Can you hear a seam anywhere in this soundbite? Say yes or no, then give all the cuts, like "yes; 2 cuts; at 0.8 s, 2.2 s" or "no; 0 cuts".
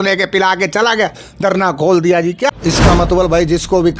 yes; 1 cut; at 2.5 s